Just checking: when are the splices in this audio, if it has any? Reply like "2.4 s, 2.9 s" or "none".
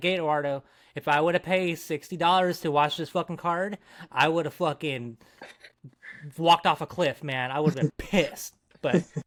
none